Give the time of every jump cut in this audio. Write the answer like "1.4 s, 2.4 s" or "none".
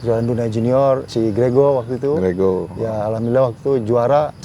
1.1 s